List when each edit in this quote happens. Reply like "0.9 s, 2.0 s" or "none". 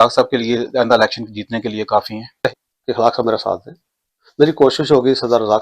2.3 s